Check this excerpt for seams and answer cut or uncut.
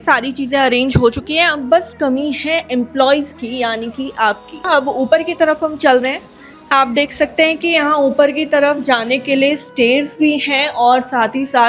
uncut